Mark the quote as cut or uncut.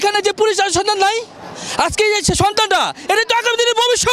uncut